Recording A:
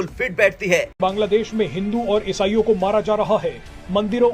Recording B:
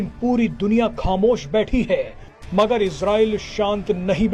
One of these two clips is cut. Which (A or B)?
A